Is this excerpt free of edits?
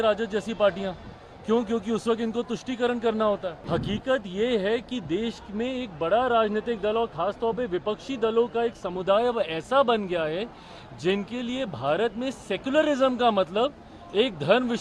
no; 1 cut; at 3.6 s

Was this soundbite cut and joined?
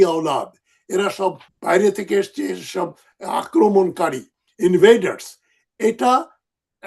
yes; 1 cut; at 1.5 s

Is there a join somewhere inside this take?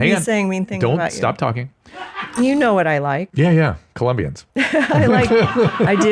yes; 3 cuts; at 2.4 s, 3.3 s, 4.4 s

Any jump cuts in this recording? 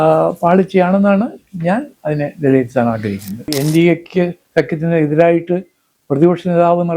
yes; 1 cut; at 3.5 s

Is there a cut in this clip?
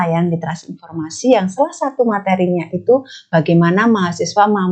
no; 0 cuts

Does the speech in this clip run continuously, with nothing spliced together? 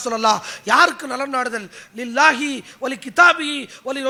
yes; 0 cuts

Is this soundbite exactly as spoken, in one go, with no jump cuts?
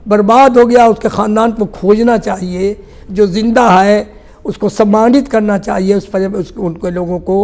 yes; 0 cuts

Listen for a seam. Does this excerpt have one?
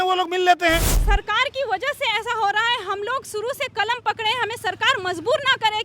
yes; 1 cut; at 0.9 s

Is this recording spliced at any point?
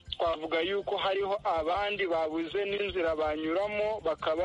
no; 0 cuts

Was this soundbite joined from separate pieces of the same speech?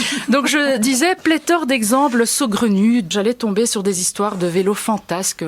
yes; 1 cut; at 3.1 s

